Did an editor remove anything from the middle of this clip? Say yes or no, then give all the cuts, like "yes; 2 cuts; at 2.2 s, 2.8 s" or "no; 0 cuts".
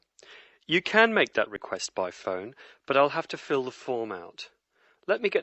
yes; 1 cut; at 1.8 s